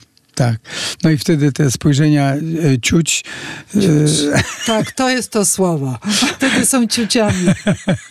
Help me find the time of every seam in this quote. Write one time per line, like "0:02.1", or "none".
0:04.9
0:06.3